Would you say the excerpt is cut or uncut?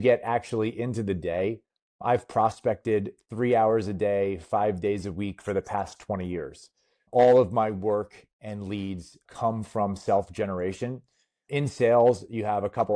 cut